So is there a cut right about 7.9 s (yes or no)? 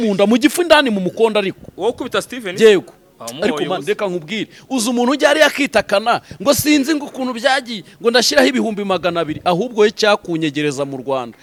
no